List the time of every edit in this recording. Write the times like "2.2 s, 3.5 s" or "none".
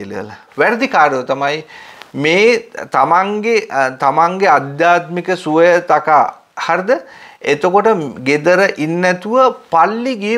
none